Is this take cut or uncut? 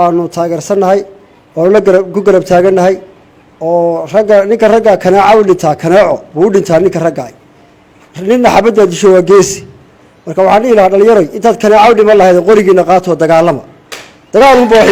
uncut